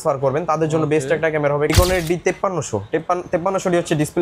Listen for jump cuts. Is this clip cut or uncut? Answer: cut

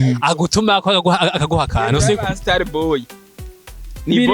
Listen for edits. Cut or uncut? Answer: uncut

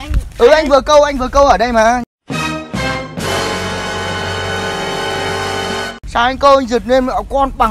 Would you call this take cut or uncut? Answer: cut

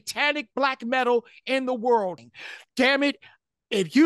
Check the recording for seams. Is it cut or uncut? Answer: cut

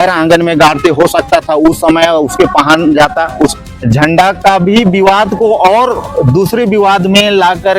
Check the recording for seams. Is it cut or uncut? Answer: cut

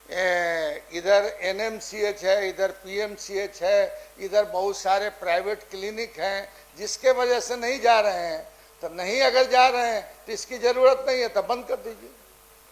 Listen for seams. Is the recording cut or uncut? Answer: uncut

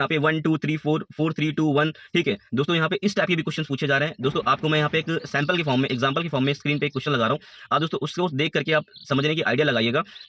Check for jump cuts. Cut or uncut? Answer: uncut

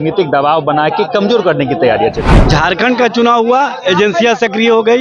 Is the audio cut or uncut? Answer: cut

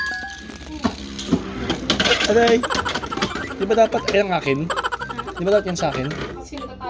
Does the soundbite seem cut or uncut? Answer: uncut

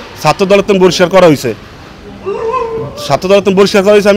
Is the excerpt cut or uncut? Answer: uncut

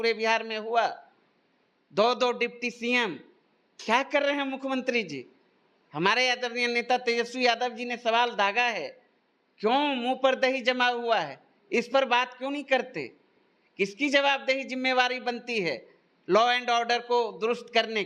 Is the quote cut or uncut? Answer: uncut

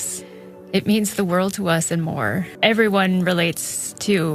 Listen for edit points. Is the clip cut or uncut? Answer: cut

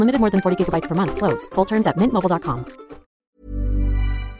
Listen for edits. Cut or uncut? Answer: cut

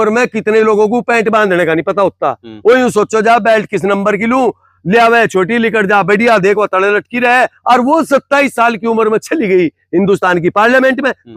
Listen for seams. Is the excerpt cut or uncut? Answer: uncut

